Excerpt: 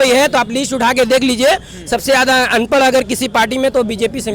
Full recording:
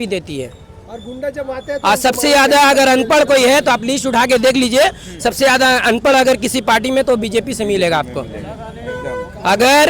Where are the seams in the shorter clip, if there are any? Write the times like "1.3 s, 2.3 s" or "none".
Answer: none